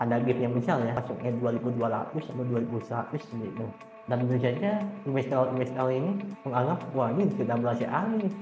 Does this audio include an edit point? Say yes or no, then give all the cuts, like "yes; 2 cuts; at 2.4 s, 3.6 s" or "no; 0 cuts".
yes; 1 cut; at 1.0 s